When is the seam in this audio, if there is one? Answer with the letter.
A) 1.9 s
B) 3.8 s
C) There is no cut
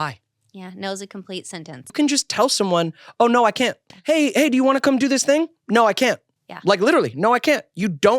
A